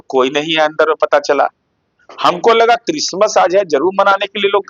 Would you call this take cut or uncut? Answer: uncut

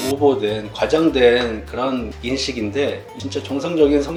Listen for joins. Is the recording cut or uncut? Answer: uncut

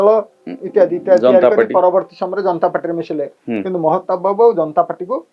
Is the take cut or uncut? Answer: uncut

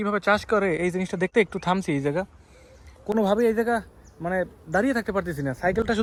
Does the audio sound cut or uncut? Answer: uncut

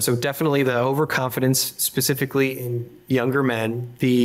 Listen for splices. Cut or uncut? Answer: uncut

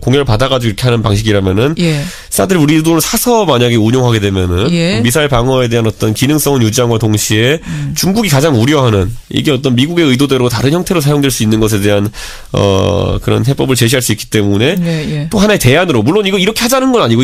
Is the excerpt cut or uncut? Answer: uncut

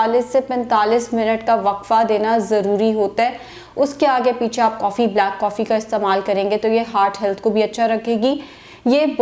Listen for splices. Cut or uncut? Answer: uncut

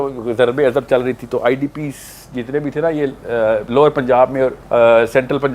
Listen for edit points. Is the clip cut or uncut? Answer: cut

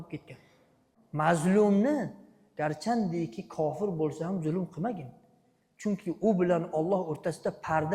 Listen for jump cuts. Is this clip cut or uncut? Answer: cut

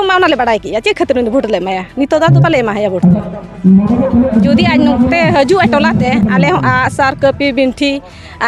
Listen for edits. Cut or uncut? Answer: uncut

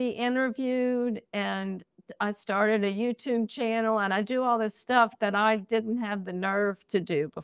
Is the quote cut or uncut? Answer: uncut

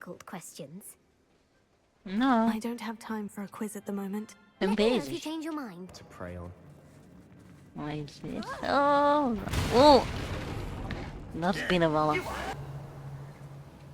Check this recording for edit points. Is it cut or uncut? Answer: cut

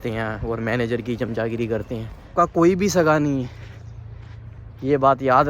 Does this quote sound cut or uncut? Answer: cut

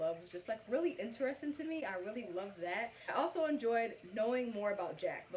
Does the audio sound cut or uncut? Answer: uncut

